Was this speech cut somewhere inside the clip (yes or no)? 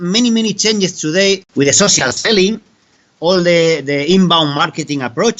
yes